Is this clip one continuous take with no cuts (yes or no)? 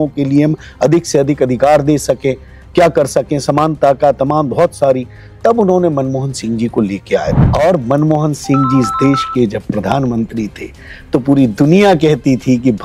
no